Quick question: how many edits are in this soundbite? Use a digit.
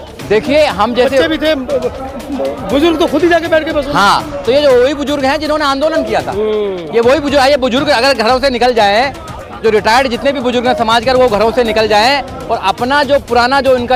0